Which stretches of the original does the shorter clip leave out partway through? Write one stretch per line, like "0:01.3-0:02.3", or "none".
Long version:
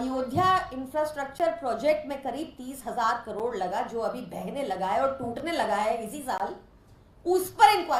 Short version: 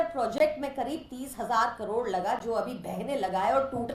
none